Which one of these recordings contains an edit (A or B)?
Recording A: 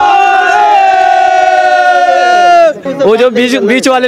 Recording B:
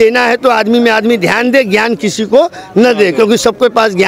A